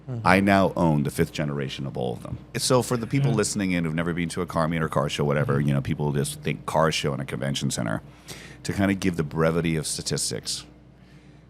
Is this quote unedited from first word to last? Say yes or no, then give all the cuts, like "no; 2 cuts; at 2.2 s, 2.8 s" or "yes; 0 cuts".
no; 1 cut; at 2.6 s